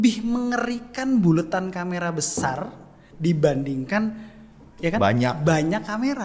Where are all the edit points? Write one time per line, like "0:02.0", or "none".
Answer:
none

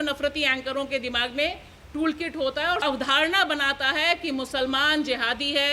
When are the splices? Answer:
0:02.8

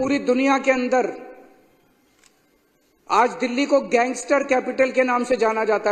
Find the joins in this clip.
none

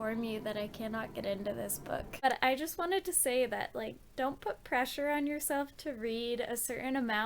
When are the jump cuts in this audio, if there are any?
0:02.2

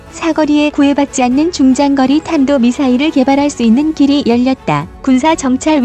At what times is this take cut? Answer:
0:04.9

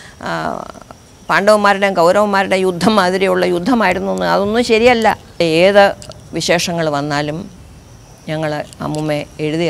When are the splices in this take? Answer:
0:05.4

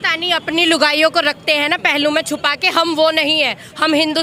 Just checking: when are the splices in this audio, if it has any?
none

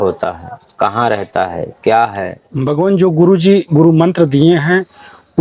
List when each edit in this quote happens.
0:02.4

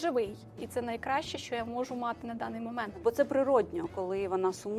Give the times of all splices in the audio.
0:03.0

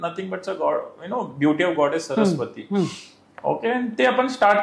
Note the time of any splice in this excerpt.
none

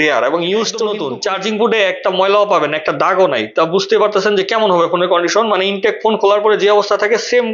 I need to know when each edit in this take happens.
0:00.9

